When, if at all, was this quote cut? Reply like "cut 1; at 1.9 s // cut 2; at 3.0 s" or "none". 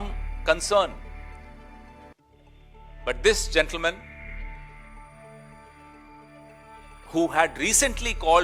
none